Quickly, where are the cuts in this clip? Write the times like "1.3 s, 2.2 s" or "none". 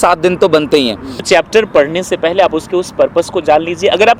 1.1 s